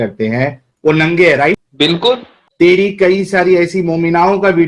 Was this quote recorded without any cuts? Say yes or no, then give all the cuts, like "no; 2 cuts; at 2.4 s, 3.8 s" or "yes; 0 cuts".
no; 1 cut; at 2.4 s